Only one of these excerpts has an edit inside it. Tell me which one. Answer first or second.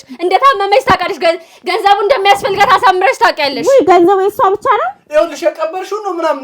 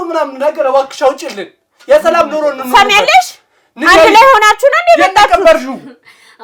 first